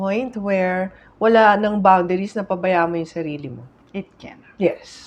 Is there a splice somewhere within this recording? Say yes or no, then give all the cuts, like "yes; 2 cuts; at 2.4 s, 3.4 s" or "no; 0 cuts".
no; 0 cuts